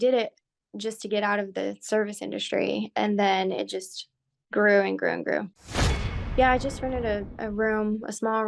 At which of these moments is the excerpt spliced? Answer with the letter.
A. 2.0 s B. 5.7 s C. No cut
B